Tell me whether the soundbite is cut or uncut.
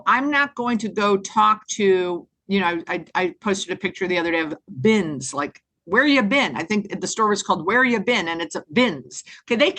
uncut